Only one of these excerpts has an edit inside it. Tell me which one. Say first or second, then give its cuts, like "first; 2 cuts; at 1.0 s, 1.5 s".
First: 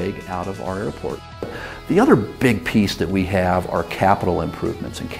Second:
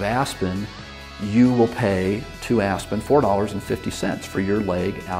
first; 1 cut; at 1.4 s